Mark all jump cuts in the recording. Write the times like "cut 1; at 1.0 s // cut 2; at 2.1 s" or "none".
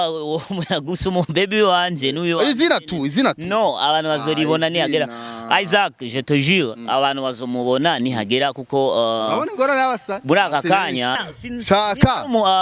cut 1; at 11.2 s